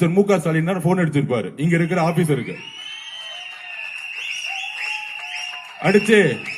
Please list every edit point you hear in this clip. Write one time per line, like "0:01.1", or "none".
none